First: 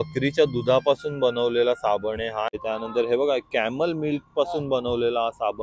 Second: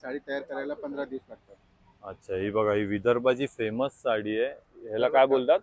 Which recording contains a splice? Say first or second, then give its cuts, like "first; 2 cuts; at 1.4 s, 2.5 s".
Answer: first; 1 cut; at 2.5 s